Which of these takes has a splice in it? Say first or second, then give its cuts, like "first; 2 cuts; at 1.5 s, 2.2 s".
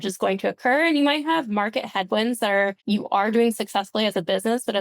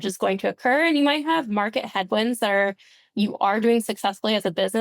first; 1 cut; at 2.8 s